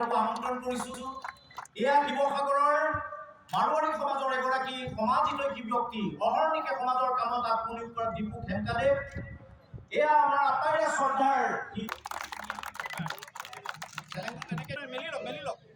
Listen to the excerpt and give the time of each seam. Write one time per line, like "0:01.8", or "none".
0:01.0